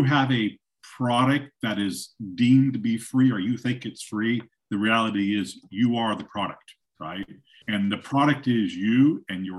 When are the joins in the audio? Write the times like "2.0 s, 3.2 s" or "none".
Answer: 7.5 s